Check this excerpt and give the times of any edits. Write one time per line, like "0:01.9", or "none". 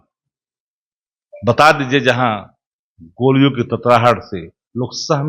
none